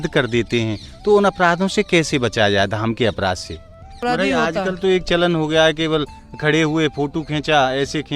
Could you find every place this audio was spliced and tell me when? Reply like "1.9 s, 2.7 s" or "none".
4.0 s